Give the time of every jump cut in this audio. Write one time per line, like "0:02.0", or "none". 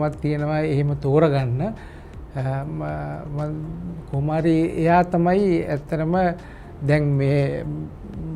none